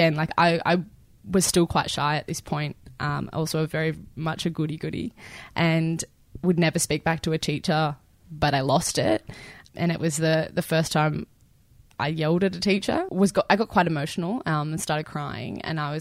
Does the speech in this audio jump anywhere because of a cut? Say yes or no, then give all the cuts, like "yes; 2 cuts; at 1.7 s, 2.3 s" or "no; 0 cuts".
yes; 2 cuts; at 9.5 s, 13.1 s